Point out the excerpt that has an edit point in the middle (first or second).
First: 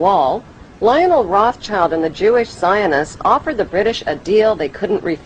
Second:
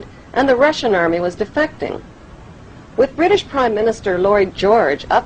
second